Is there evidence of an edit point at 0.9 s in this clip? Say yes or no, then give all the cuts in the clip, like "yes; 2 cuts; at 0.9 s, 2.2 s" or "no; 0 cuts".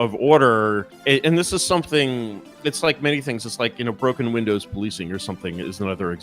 yes; 1 cut; at 0.9 s